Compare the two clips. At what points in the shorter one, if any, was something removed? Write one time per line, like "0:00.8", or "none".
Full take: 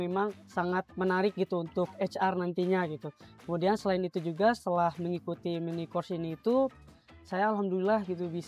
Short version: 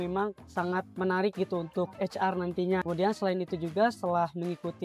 0:02.8